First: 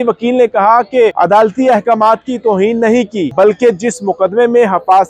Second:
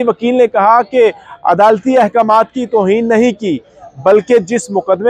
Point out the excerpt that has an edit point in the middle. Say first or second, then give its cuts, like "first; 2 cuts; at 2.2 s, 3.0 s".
first; 2 cuts; at 1.1 s, 3.3 s